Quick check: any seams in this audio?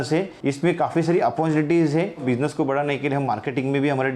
yes; 1 cut; at 2.2 s

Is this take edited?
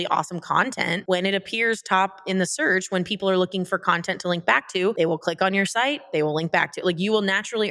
yes; 1 cut; at 4.9 s

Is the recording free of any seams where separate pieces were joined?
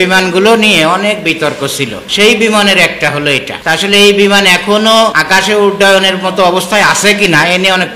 yes; 0 cuts

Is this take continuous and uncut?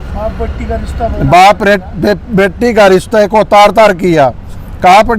yes; 0 cuts

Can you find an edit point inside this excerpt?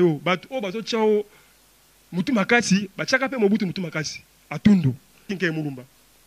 yes; 1 cut; at 5.3 s

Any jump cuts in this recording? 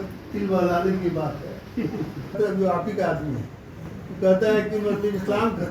yes; 1 cut; at 2.3 s

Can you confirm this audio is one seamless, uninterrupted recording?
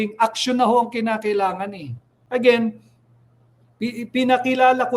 no; 1 cut; at 2.1 s

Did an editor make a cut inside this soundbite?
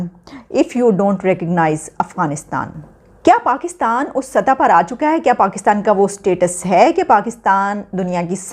yes; 1 cut; at 2.9 s

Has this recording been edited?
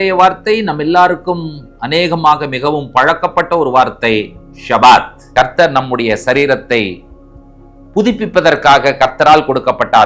yes; 1 cut; at 5.2 s

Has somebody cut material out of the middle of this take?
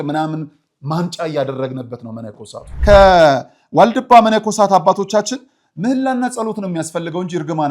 yes; 1 cut; at 2.7 s

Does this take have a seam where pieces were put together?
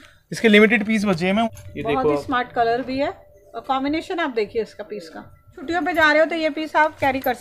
yes; 2 cuts; at 1.5 s, 5.6 s

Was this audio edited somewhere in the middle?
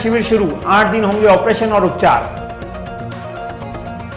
no; 0 cuts

